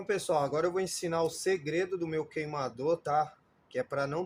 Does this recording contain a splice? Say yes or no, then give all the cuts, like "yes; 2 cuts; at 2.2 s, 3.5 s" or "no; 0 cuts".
no; 0 cuts